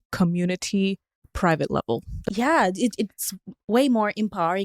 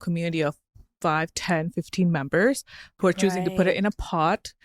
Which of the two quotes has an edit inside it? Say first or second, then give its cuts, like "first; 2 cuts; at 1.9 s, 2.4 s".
first; 1 cut; at 2.1 s